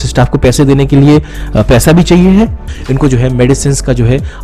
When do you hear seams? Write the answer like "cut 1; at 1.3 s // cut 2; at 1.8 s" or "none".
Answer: cut 1; at 2.7 s